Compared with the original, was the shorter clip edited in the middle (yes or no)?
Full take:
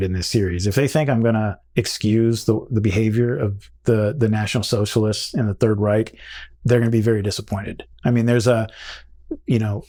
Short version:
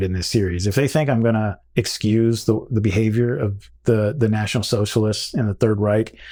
no